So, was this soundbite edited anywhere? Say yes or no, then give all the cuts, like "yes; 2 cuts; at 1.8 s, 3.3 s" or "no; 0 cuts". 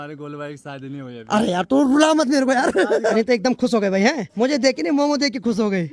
yes; 2 cuts; at 3.1 s, 4.3 s